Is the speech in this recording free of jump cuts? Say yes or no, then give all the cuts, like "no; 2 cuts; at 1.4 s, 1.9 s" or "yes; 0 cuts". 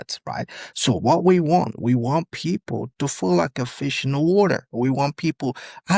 yes; 0 cuts